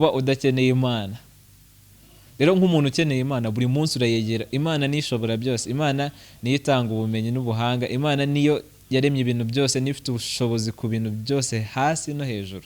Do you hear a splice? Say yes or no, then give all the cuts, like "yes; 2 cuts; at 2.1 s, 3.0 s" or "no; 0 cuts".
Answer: no; 0 cuts